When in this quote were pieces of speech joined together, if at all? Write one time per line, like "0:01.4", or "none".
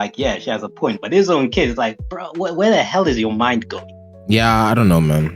none